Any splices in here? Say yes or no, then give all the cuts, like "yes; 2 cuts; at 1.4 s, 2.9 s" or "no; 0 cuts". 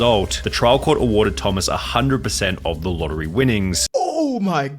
yes; 1 cut; at 3.8 s